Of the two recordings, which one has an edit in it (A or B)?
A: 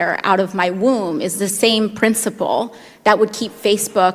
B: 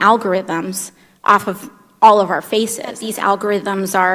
B